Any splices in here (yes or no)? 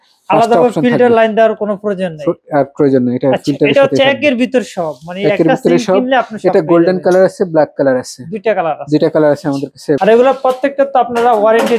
yes